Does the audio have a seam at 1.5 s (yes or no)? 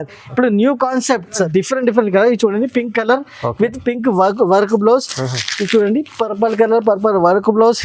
yes